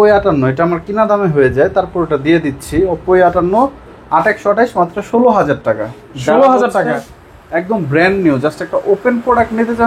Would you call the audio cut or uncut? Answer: uncut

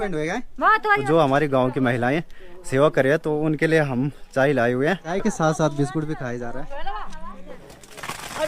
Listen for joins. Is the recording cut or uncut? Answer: cut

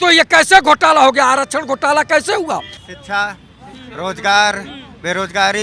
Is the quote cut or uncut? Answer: cut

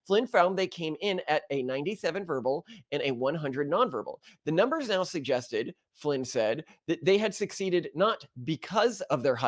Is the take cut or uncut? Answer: cut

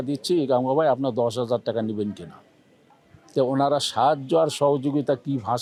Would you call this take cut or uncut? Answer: uncut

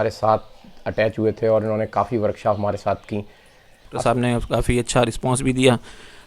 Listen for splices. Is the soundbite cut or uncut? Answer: cut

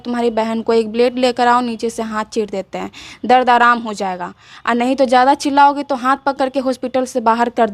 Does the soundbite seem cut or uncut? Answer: uncut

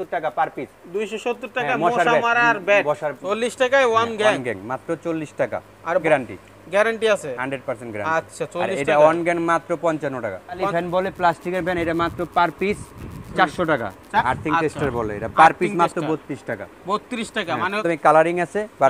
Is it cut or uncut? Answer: cut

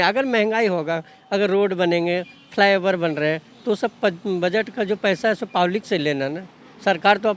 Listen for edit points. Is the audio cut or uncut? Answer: uncut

